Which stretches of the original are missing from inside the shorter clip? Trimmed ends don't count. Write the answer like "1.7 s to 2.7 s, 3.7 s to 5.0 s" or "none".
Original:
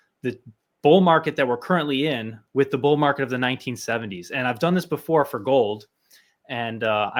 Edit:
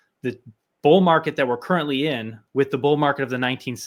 none

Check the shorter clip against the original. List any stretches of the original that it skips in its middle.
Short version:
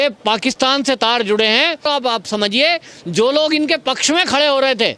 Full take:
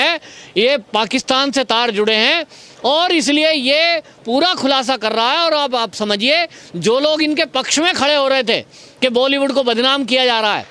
2.5 s to 5.5 s

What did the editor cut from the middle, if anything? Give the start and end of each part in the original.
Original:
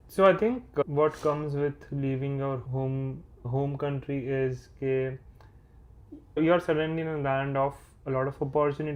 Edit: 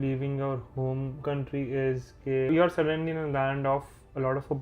3.2 s to 3.7 s, 5.0 s to 6.4 s

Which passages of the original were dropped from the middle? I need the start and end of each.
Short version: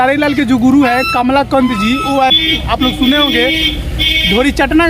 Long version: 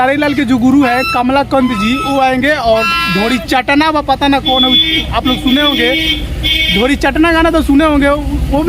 2.3 s to 4.8 s

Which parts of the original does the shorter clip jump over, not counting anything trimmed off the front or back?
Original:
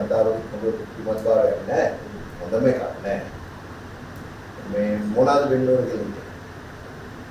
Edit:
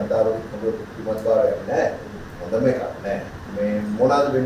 3.4 s to 4.5 s

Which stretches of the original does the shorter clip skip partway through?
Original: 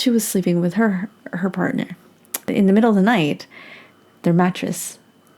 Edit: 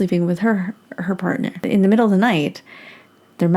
1.9 s to 2.4 s

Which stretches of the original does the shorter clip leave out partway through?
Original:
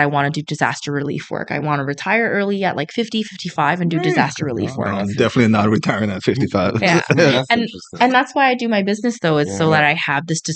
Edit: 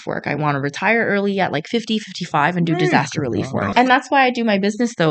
4.8 s to 7.8 s

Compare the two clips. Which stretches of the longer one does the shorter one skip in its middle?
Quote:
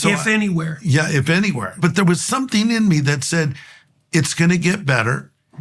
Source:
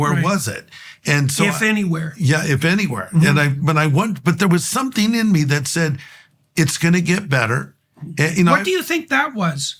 3.1 s to 4.2 s

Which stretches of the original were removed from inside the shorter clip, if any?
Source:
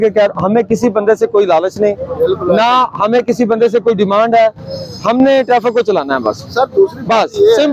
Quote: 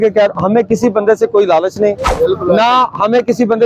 none

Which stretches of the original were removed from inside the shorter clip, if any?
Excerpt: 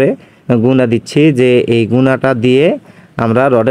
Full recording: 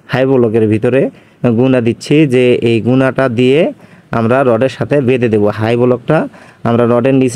none

